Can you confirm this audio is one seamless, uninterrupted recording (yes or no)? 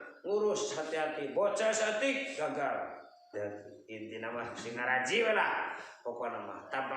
no